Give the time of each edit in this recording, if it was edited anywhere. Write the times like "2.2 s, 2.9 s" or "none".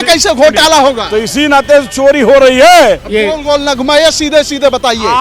3.0 s